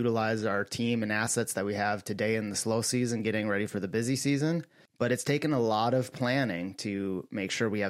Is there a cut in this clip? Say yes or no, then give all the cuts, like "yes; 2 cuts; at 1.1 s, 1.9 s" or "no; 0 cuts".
no; 0 cuts